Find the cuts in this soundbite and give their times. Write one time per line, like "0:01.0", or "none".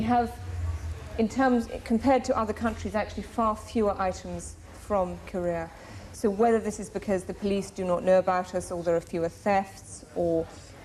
0:05.9